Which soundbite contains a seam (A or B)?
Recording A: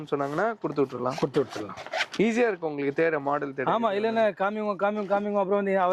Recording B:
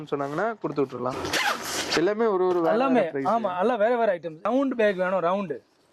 B